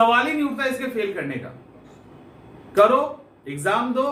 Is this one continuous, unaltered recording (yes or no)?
yes